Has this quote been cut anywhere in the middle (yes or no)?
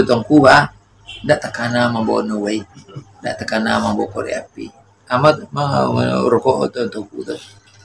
no